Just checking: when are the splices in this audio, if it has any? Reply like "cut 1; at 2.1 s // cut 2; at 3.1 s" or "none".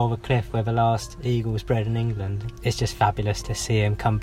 cut 1; at 2.5 s // cut 2; at 3.4 s

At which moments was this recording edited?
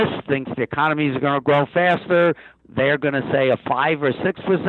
cut 1; at 2.5 s

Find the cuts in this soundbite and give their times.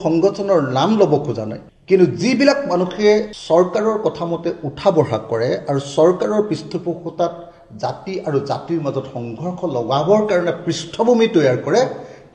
none

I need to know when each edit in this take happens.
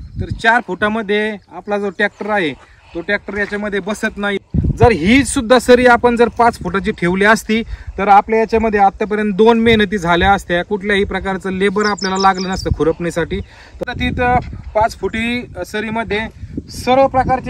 cut 1; at 4.4 s // cut 2; at 13.8 s

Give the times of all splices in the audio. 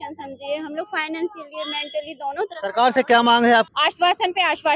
cut 1; at 3.7 s

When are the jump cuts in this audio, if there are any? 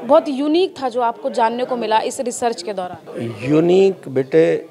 cut 1; at 3.0 s

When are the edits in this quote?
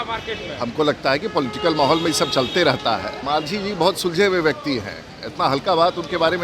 cut 1; at 3.2 s

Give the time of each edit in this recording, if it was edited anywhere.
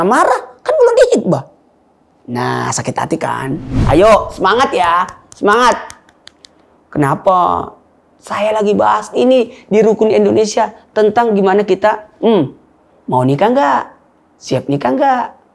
cut 1; at 3.8 s

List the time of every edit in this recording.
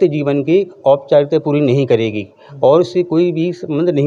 none

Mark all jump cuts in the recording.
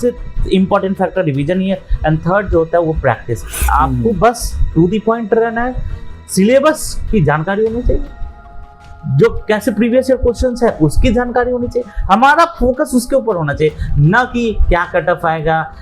cut 1; at 3.7 s

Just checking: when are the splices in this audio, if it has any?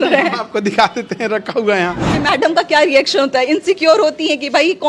cut 1; at 2.2 s

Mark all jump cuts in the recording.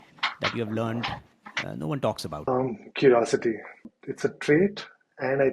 cut 1; at 2.5 s // cut 2; at 4.0 s

